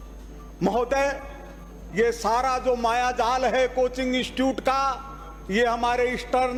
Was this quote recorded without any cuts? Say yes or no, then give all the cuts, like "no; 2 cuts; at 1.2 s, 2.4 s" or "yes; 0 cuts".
yes; 0 cuts